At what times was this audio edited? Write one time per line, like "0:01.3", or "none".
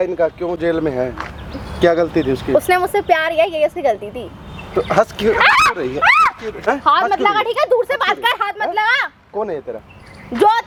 none